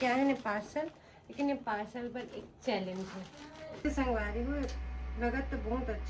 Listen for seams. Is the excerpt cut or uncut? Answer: cut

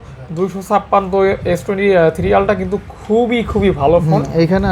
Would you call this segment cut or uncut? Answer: uncut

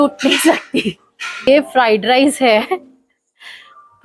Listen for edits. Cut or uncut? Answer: cut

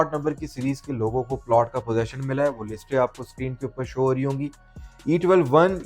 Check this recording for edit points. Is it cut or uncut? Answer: cut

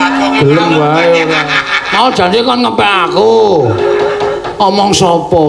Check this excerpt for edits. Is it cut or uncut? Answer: uncut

